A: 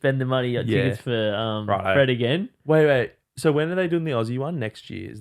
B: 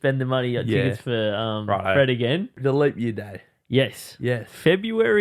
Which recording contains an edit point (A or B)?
B